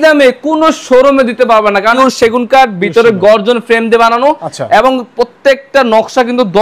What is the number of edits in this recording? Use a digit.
1